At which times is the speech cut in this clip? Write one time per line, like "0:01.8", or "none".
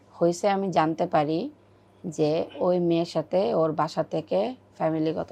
none